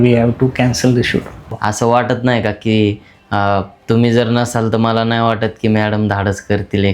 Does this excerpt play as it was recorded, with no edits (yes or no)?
no